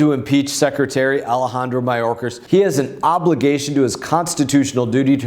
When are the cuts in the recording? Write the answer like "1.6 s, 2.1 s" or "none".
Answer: 2.3 s